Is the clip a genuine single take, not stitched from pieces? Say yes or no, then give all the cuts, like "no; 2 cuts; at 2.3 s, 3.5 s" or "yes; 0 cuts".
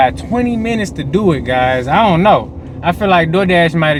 yes; 0 cuts